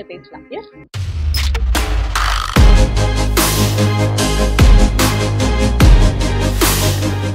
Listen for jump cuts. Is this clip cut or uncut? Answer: uncut